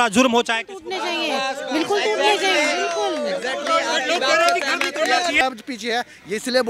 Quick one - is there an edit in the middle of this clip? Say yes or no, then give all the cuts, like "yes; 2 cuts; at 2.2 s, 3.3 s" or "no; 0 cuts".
yes; 1 cut; at 5.4 s